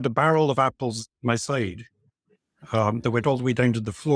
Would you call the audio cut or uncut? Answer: uncut